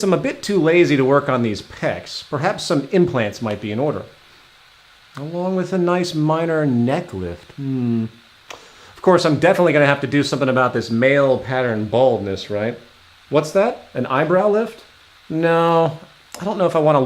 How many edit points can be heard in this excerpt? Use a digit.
1